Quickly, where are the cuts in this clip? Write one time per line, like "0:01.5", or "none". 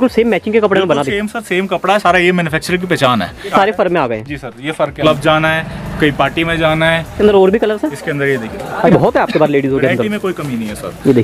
0:03.5
0:05.0
0:07.2
0:08.9